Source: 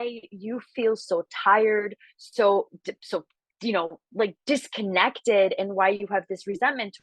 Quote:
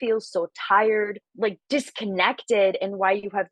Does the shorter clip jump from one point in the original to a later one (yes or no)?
yes